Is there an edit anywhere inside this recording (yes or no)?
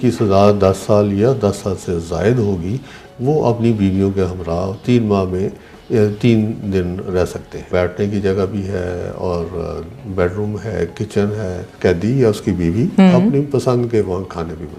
yes